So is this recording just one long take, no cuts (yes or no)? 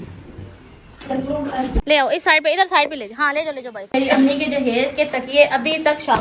no